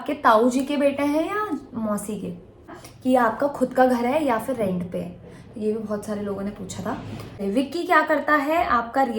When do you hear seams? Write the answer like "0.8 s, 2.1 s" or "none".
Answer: 2.8 s, 7.4 s